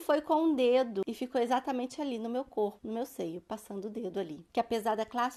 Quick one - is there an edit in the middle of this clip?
yes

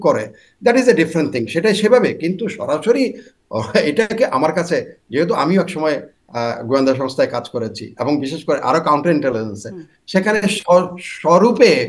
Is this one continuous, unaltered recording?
yes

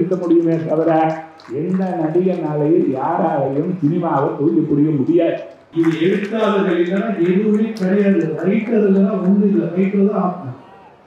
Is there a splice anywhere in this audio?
yes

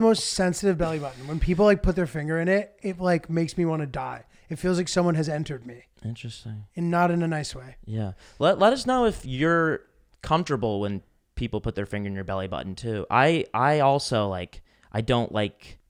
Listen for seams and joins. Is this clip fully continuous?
yes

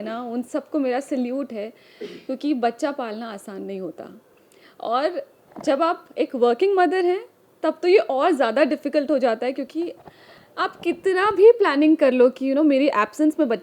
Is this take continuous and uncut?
yes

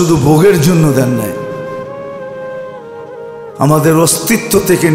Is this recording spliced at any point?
yes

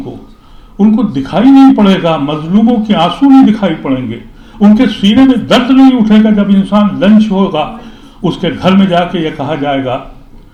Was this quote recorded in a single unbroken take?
yes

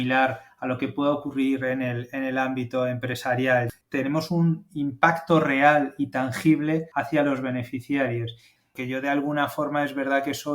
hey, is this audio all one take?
no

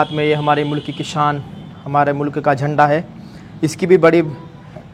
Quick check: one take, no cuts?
yes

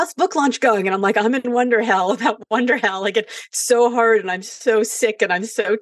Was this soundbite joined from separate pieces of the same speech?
no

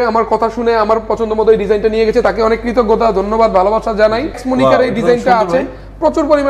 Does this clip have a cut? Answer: yes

